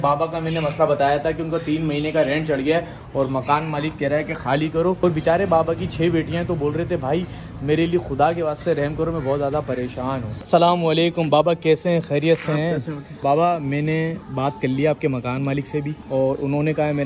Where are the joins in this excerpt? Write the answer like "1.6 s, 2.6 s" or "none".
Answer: 5.0 s, 10.4 s, 13.2 s, 16.0 s